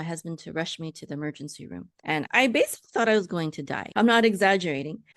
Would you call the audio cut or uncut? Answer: cut